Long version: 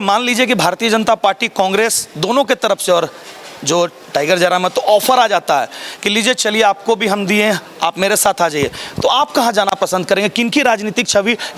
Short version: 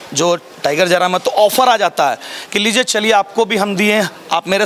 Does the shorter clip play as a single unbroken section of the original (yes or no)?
yes